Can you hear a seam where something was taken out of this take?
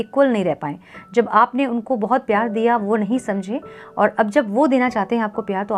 no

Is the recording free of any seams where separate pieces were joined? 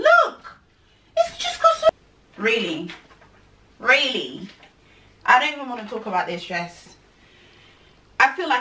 no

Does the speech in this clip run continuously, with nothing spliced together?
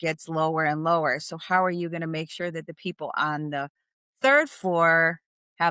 yes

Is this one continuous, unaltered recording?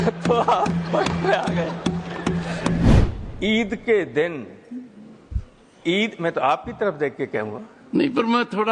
no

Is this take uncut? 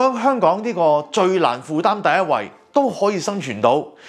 yes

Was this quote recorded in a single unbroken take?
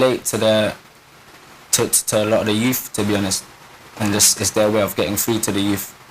no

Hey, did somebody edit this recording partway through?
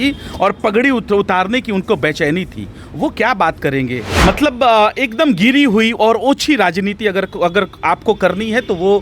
yes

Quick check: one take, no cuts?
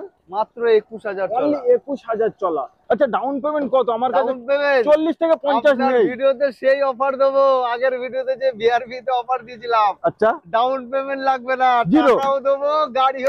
yes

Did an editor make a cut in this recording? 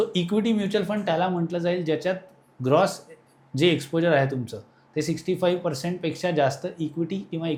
no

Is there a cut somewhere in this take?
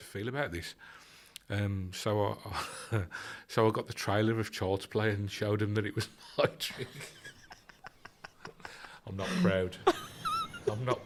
no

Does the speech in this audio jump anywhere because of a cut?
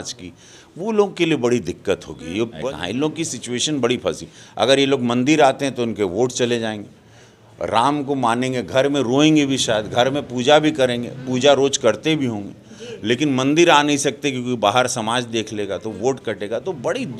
yes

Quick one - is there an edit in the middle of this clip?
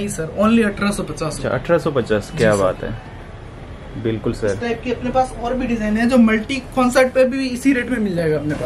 no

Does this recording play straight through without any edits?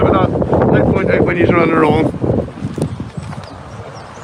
yes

